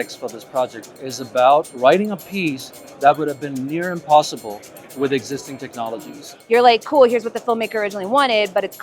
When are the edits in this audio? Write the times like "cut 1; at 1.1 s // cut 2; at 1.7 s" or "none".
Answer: cut 1; at 1.7 s // cut 2; at 6.3 s